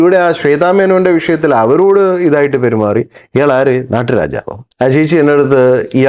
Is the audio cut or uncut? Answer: cut